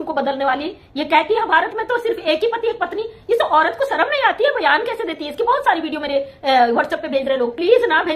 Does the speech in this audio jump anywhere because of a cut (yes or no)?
no